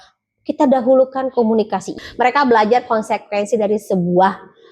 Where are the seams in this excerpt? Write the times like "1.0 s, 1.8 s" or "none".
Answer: 1.9 s